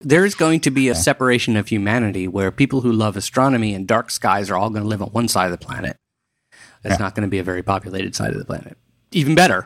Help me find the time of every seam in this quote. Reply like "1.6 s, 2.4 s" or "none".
0.9 s